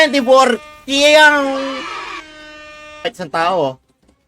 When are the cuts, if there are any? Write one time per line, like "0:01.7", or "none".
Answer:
0:03.1